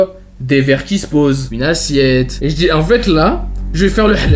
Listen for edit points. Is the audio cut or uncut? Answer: cut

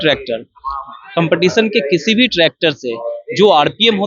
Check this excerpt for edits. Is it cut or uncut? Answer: uncut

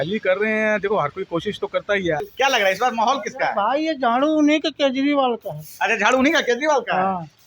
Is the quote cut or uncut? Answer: cut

